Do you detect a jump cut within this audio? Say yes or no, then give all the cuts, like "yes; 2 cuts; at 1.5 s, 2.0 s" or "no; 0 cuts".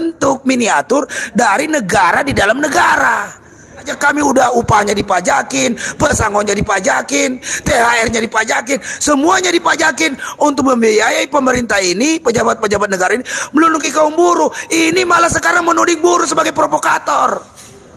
yes; 1 cut; at 3.9 s